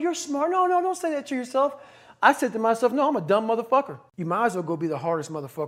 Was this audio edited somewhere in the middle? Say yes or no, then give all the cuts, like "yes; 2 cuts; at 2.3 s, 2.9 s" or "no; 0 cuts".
no; 0 cuts